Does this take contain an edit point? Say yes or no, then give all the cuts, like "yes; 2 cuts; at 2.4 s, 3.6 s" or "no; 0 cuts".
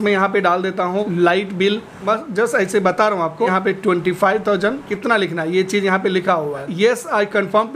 yes; 5 cuts; at 1.1 s, 2.0 s, 3.5 s, 4.9 s, 6.7 s